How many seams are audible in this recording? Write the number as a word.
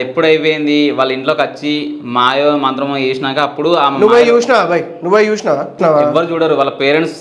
one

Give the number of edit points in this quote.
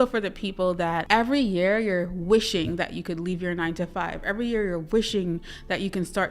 one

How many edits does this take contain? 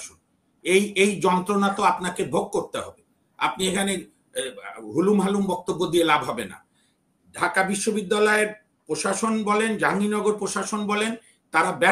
zero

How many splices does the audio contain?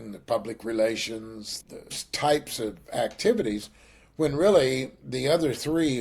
one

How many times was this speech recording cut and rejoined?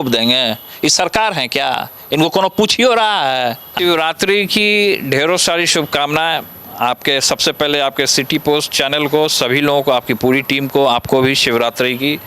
one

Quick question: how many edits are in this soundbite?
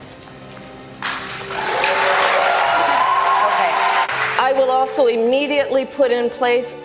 one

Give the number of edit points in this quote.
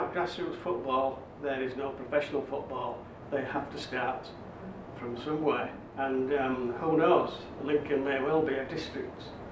one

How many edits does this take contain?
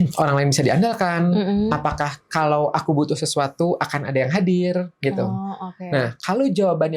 zero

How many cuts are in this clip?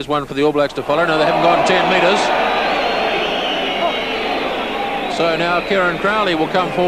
one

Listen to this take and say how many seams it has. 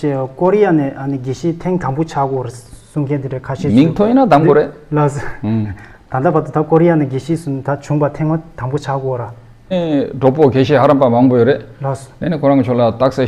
one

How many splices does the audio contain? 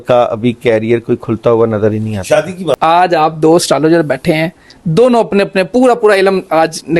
one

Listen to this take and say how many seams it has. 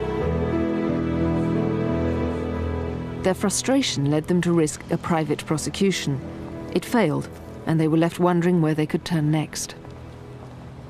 one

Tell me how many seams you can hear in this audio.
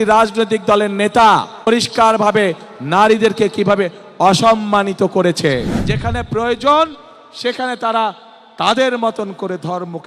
two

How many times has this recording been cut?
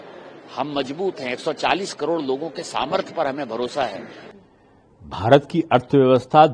one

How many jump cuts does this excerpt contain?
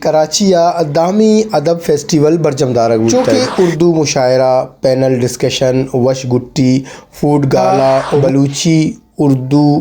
two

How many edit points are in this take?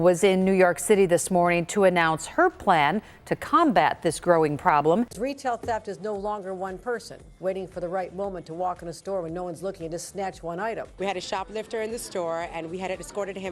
two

